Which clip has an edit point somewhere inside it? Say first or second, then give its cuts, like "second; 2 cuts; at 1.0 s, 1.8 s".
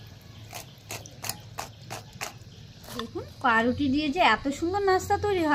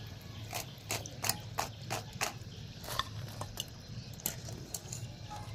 first; 1 cut; at 2.9 s